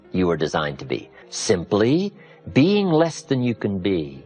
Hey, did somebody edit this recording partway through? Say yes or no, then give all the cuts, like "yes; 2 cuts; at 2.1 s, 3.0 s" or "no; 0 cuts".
yes; 1 cut; at 1.2 s